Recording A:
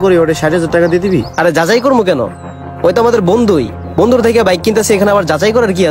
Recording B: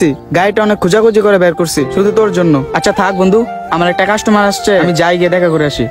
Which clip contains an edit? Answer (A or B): B